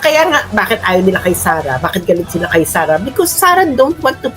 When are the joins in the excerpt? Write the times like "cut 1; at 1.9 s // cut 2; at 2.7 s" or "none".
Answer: none